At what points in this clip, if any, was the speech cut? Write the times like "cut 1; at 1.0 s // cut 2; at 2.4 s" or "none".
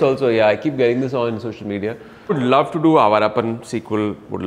cut 1; at 2.4 s